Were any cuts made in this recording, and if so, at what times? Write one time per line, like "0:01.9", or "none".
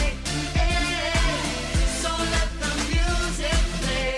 none

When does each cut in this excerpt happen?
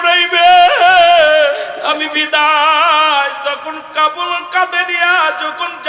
0:01.8

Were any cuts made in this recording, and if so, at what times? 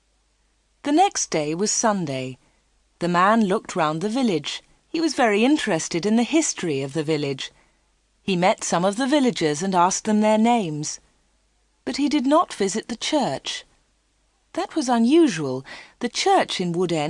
0:07.2

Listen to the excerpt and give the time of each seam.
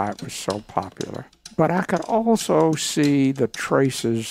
0:01.3

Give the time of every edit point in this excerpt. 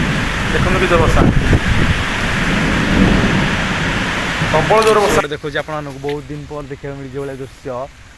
0:05.2

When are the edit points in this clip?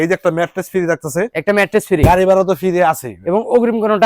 none

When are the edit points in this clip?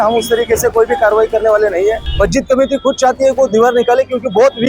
0:02.0

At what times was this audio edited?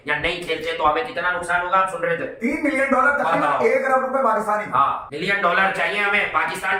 none

